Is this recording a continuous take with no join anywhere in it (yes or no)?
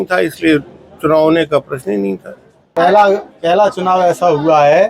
no